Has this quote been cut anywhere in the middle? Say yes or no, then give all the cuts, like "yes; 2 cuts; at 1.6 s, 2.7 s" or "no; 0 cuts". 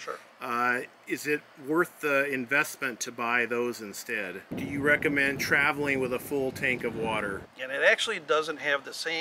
yes; 2 cuts; at 4.6 s, 7.4 s